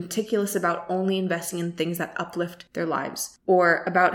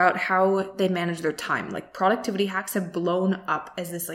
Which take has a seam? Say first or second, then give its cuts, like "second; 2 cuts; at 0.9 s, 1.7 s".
first; 1 cut; at 2.8 s